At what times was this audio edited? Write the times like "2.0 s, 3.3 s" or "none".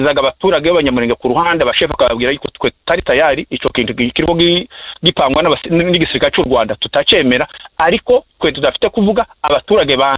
none